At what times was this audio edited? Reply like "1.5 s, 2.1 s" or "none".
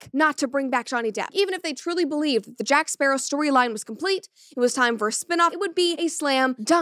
1.3 s, 5.6 s